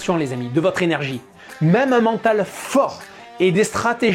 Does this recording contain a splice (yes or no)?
no